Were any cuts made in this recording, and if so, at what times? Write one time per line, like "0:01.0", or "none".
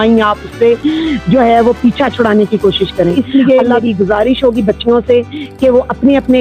0:03.1